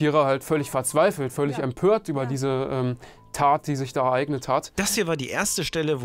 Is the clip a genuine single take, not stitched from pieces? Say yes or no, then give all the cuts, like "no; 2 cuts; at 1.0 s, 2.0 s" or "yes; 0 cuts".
yes; 0 cuts